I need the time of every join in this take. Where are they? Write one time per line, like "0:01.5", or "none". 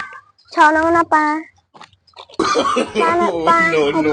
none